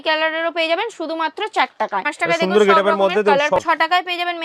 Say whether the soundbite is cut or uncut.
cut